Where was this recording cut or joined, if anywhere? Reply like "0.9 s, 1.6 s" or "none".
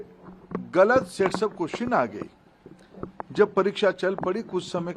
none